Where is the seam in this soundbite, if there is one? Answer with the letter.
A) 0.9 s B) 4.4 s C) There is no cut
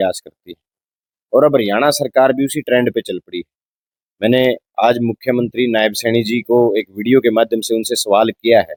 C